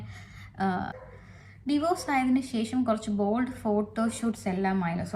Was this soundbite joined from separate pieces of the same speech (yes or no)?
yes